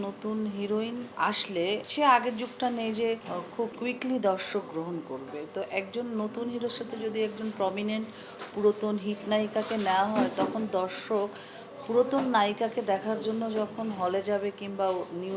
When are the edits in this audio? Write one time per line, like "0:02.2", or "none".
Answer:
0:01.5
0:03.7

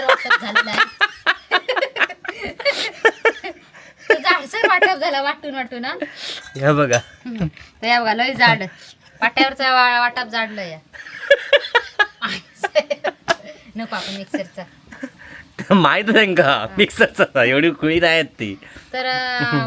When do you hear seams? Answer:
none

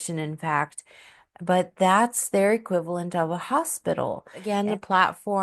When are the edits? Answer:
0:04.4

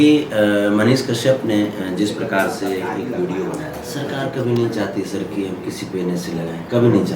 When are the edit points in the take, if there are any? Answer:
0:03.8

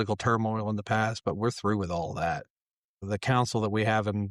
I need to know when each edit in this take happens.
0:03.0

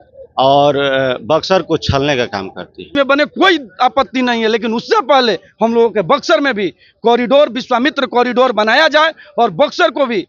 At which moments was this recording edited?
0:03.0

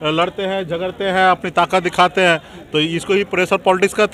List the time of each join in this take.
none

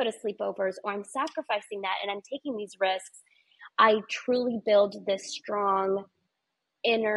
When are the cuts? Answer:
none

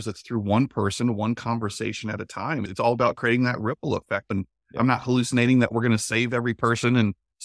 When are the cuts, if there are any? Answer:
0:02.7
0:04.3

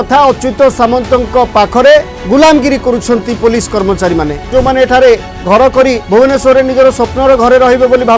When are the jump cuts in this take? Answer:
0:02.2
0:04.5
0:06.0

